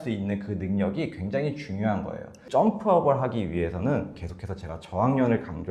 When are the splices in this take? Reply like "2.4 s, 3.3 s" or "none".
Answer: 2.4 s